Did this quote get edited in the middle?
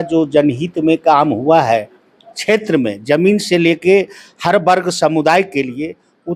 no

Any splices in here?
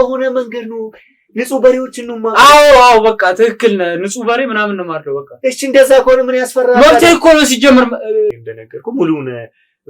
yes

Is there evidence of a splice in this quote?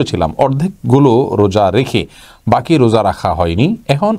no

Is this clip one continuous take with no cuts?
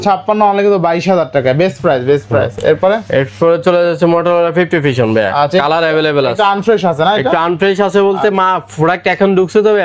yes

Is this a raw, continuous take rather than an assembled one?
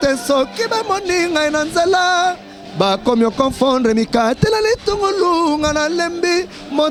yes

